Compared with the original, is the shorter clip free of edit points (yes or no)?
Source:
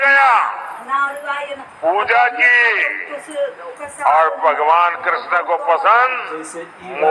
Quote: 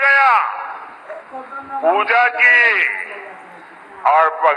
yes